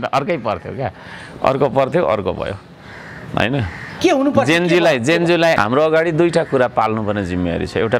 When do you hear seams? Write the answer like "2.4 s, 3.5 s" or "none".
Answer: 5.6 s